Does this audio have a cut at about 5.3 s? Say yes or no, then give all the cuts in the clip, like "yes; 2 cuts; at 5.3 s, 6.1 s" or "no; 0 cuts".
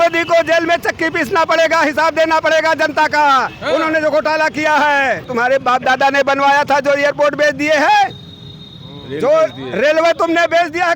yes; 1 cut; at 5.3 s